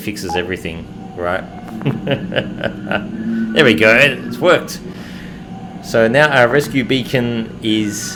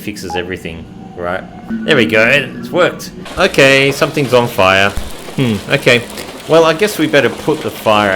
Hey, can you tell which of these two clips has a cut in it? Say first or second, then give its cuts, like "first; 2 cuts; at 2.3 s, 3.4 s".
second; 2 cuts; at 1.7 s, 3.3 s